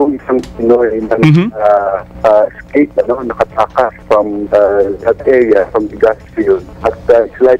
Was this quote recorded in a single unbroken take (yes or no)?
no